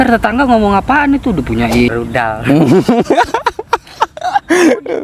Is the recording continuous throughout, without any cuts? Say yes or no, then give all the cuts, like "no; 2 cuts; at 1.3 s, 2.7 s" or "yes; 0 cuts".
no; 1 cut; at 1.9 s